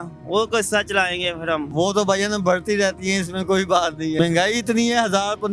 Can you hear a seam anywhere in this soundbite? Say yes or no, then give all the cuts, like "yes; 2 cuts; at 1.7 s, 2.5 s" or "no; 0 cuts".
yes; 2 cuts; at 1.7 s, 4.1 s